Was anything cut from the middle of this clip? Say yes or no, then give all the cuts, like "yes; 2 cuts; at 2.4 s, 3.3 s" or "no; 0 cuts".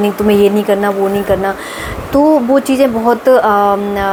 no; 0 cuts